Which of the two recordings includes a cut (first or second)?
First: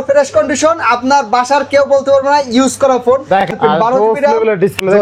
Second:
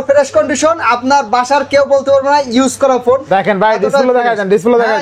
first